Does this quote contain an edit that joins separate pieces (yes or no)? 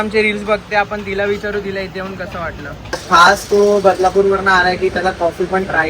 yes